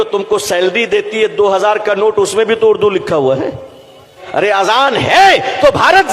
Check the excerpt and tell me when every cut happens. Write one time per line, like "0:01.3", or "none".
0:04.1